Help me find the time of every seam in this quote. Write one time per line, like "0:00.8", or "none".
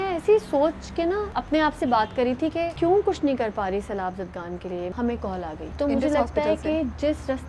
0:01.3
0:02.7
0:04.9
0:05.7